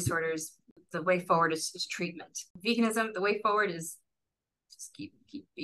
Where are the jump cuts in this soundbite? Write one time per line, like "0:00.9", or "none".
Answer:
0:00.9
0:02.5